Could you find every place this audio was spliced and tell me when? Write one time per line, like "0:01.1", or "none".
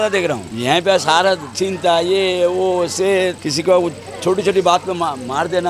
none